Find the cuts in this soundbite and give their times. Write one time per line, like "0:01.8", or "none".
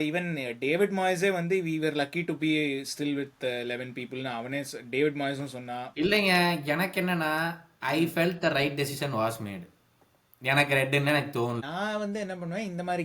0:11.6